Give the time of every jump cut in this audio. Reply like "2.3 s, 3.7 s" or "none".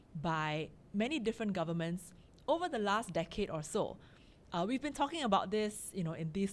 none